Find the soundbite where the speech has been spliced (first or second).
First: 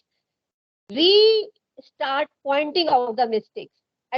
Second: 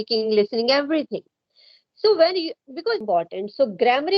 second